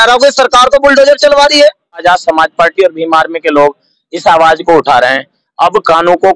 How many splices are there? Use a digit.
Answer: 1